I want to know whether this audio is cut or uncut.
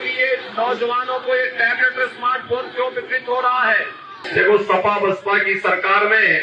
cut